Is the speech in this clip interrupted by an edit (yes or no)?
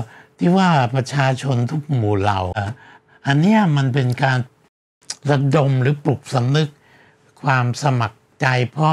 yes